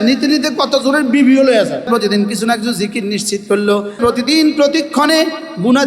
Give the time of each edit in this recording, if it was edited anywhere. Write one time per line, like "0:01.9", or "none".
0:01.9
0:04.0

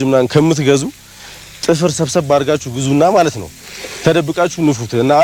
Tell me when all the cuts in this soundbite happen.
none

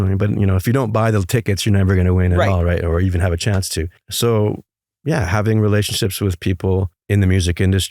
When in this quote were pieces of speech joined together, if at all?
0:04.0
0:07.0

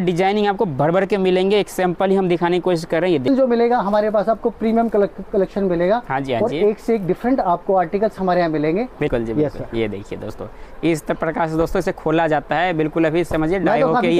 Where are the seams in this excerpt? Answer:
0:03.3
0:09.1

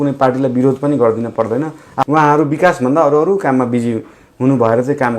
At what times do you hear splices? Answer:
0:02.0

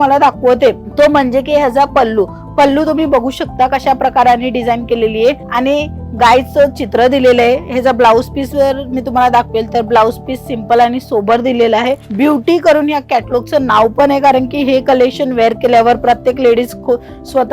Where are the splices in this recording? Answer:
0:12.1

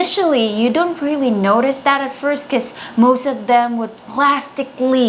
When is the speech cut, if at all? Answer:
none

